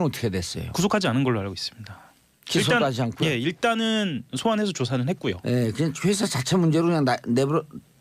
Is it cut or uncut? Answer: cut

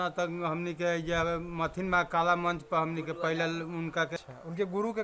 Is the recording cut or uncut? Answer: cut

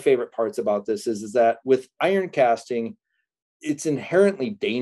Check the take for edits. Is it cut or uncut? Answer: uncut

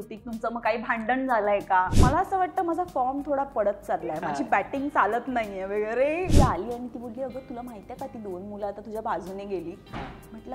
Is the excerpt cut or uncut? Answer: cut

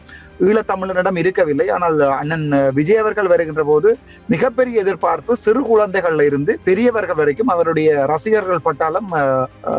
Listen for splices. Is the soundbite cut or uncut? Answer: uncut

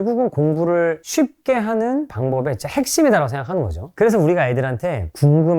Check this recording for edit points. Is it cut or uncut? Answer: cut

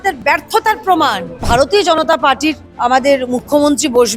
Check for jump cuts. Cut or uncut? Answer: cut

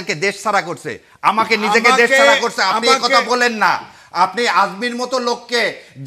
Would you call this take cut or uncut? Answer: uncut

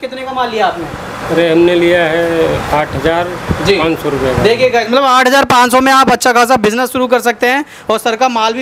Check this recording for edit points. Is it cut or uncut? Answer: uncut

